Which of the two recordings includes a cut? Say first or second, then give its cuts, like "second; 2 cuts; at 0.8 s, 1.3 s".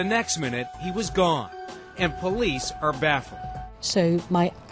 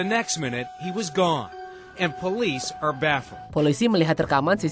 first; 1 cut; at 3.4 s